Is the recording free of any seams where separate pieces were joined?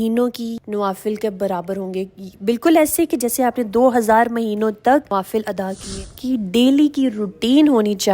no; 1 cut; at 6.1 s

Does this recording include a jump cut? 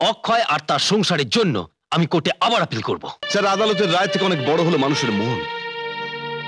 yes; 1 cut; at 3.2 s

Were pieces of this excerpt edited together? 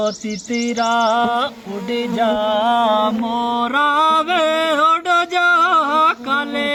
no; 0 cuts

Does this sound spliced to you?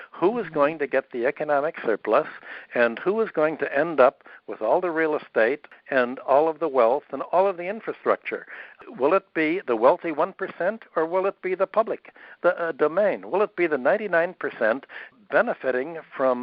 no; 0 cuts

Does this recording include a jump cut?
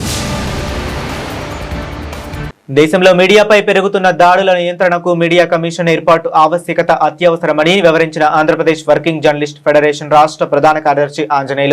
no; 0 cuts

